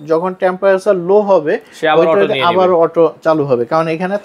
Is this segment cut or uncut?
uncut